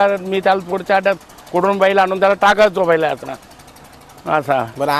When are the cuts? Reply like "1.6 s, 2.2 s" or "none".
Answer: none